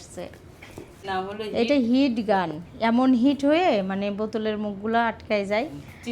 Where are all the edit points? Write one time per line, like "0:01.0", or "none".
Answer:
0:01.1